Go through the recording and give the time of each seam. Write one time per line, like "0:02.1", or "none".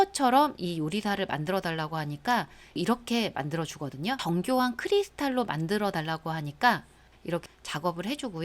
0:02.8
0:04.2
0:07.5